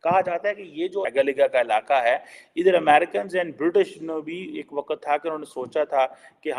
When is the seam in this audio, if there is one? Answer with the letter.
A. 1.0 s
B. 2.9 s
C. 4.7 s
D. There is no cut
A